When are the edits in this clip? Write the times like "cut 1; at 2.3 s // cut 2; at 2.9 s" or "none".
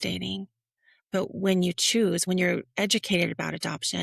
cut 1; at 2.2 s